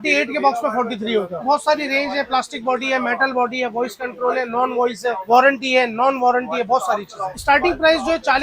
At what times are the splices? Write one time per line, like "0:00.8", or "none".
none